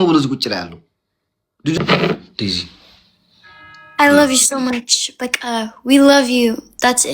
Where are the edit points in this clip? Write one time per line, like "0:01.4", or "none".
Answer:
0:01.8